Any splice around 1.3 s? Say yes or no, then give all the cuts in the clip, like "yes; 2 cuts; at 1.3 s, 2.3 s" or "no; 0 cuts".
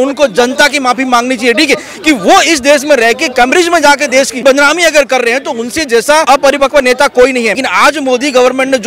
no; 3 cuts; at 4.4 s, 6.3 s, 7.6 s